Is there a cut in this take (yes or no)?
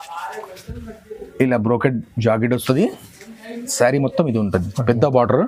no